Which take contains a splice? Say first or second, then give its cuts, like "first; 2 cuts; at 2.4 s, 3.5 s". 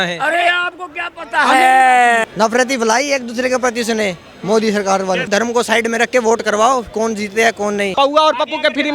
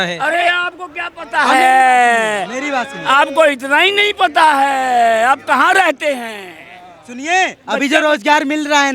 first; 3 cuts; at 2.3 s, 5.3 s, 7.9 s